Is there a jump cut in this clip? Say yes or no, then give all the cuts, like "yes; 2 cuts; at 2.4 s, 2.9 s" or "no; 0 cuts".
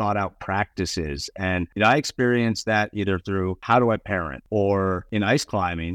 yes; 4 cuts; at 1.7 s, 3.6 s, 4.3 s, 5.0 s